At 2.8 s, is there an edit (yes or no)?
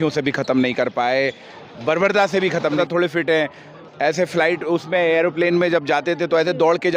yes